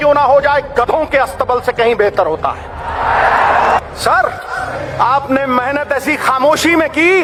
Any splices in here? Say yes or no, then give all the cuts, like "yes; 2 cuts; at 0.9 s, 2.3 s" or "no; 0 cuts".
no; 0 cuts